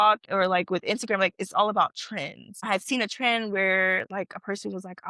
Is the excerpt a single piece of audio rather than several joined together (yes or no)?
no